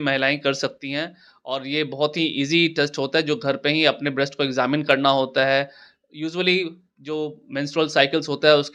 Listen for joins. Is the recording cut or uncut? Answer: uncut